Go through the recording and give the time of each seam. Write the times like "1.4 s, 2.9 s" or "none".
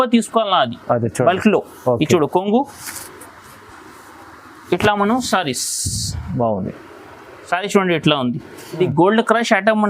8.6 s

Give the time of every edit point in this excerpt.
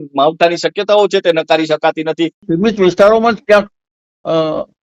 2.4 s

